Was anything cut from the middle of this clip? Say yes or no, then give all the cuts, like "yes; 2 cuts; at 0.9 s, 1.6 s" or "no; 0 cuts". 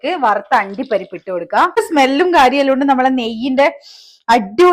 yes; 1 cut; at 1.8 s